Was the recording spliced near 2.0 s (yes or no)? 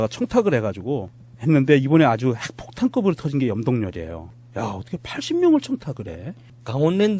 no